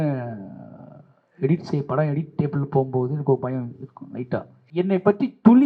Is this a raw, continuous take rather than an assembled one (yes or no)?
no